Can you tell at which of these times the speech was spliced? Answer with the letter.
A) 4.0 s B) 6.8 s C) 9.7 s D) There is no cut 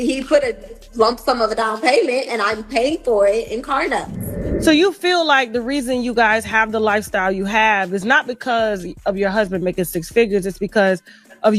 A